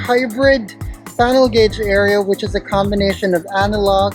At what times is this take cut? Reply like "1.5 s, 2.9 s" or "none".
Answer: none